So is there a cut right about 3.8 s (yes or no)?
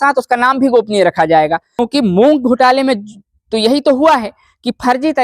no